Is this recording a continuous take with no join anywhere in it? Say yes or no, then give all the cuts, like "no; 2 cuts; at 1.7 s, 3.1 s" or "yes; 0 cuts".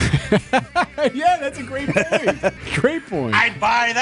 no; 1 cut; at 2.7 s